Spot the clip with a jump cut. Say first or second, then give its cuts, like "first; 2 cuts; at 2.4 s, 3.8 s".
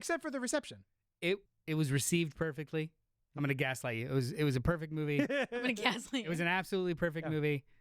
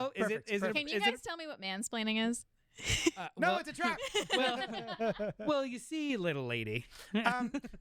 first; 1 cut; at 1.5 s